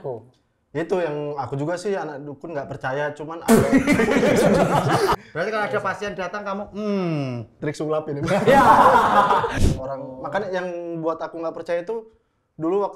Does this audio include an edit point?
yes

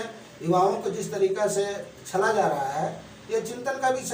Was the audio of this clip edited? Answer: no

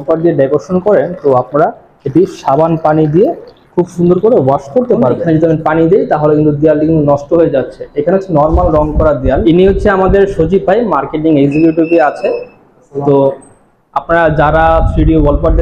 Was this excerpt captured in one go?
no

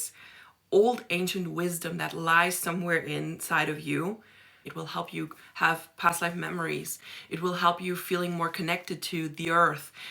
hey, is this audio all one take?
no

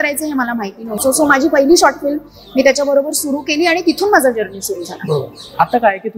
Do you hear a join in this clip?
no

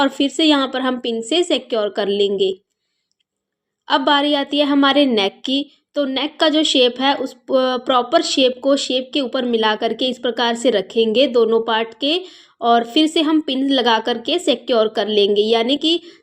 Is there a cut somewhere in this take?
no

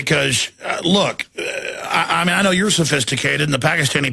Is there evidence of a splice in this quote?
no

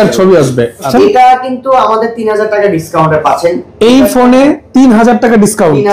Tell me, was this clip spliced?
yes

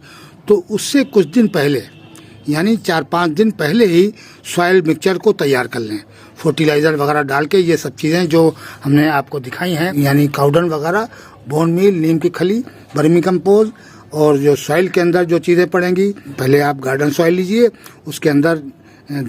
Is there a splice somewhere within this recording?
yes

